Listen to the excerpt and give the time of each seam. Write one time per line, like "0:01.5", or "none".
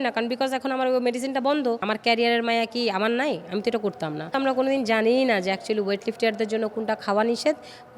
0:01.8
0:04.3